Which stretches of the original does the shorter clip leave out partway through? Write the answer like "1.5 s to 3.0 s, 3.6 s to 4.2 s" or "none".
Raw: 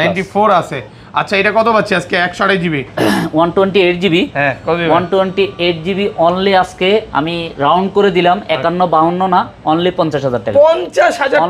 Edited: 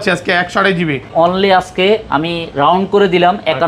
2.9 s to 6.1 s